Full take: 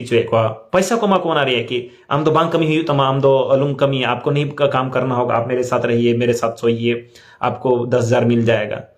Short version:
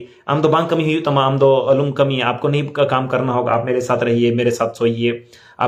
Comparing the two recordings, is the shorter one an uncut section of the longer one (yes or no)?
yes